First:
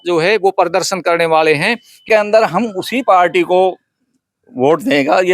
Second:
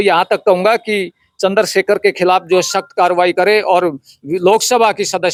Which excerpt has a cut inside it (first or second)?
first